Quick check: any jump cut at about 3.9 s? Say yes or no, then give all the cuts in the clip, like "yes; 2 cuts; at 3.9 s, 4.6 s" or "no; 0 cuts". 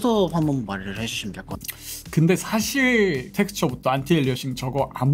no; 1 cut; at 1.6 s